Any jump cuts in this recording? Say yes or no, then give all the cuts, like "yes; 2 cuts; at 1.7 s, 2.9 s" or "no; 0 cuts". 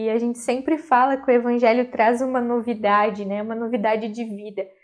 no; 0 cuts